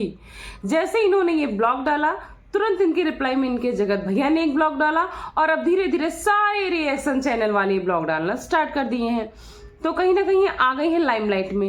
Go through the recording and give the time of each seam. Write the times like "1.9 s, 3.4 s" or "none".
none